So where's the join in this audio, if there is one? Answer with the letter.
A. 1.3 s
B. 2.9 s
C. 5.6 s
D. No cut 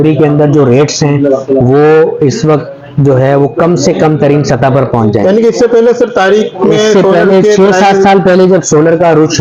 D